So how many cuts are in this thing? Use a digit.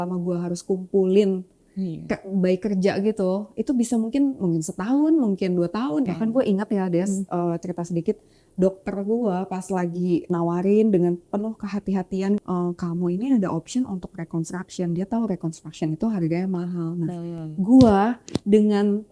2